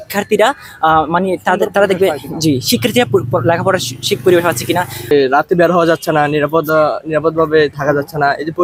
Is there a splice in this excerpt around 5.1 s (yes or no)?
yes